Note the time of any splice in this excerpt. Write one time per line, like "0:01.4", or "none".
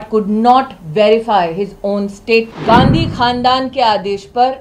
0:02.5